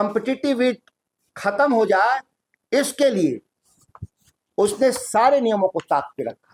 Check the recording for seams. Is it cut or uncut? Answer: uncut